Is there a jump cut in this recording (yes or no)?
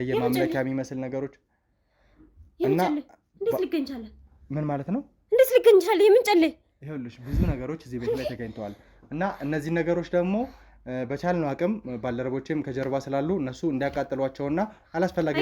no